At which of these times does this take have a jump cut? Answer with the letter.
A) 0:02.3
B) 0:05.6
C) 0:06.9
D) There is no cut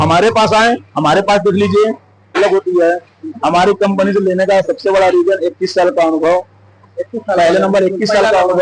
A